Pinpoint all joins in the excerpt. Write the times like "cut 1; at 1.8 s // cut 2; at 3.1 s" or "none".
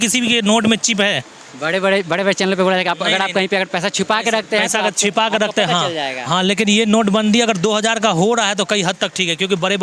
none